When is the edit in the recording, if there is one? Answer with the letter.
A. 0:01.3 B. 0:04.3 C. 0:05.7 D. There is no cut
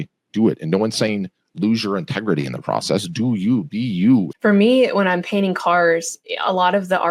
B